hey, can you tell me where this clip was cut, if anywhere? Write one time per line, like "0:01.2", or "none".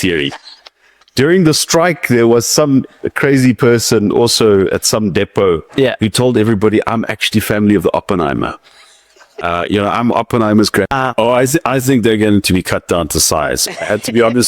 0:10.9